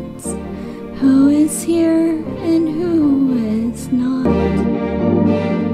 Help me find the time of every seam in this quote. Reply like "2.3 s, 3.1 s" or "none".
4.2 s